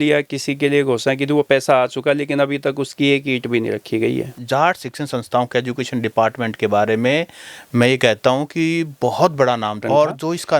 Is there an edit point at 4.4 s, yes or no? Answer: yes